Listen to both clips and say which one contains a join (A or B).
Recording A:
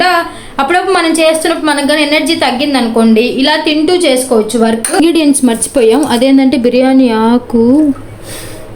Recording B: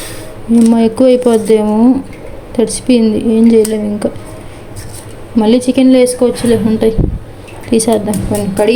A